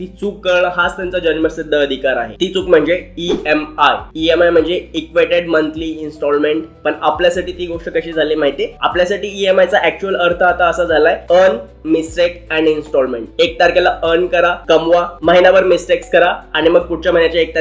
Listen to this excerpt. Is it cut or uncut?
uncut